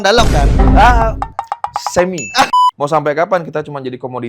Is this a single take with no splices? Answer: no; 1 cut; at 2.5 s

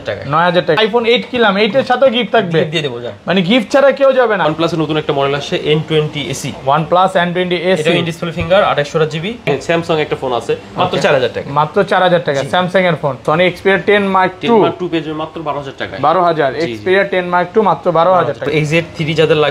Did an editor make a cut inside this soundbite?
yes; 5 cuts; at 0.8 s, 4.5 s, 9.5 s, 13.2 s, 18.4 s

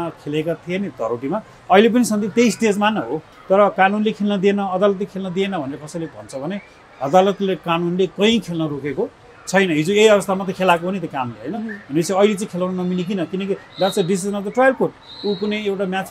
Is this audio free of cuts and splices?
no; 1 cut; at 3.3 s

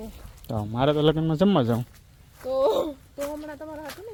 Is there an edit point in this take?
no; 0 cuts

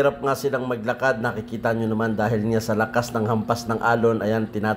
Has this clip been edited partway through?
no; 0 cuts

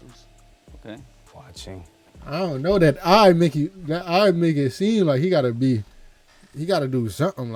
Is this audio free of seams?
yes; 0 cuts

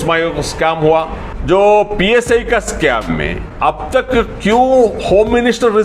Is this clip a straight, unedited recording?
no; 2 cuts; at 1.3 s, 3.4 s

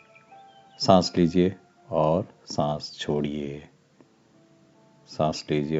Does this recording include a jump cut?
no; 0 cuts

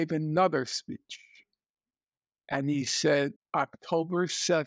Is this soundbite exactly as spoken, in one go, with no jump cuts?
no; 1 cut; at 3.4 s

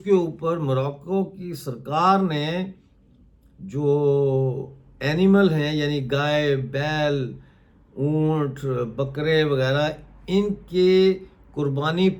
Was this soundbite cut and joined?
no; 0 cuts

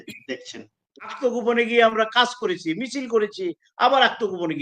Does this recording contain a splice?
yes; 1 cut; at 1.2 s

